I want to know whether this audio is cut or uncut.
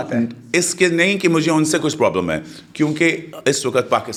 uncut